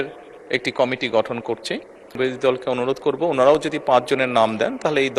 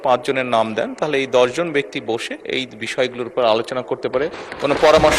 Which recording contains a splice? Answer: first; 1 cut; at 2.1 s

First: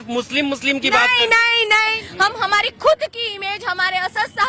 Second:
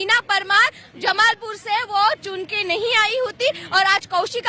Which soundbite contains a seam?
first; 1 cut; at 2.0 s

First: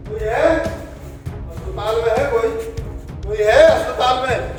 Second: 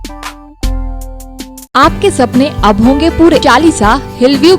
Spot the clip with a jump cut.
second; 2 cuts; at 1.7 s, 3.4 s

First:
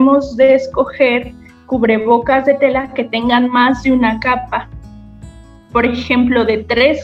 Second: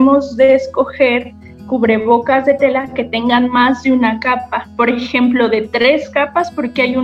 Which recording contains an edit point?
second; 1 cut; at 4.7 s

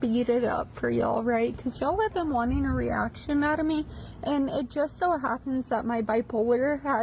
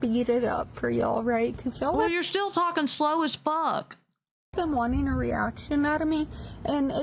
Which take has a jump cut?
first; 1 cut; at 2.1 s

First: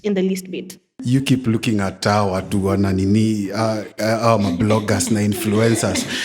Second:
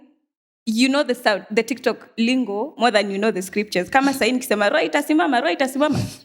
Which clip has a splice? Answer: first; 1 cut; at 0.9 s

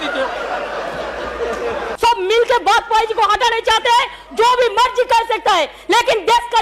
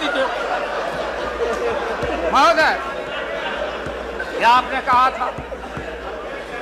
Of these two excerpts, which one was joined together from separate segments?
first; 1 cut; at 1.9 s

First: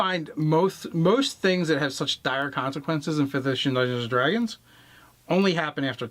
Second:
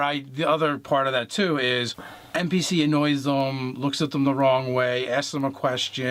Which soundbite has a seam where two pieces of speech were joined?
first; 1 cut; at 3.3 s

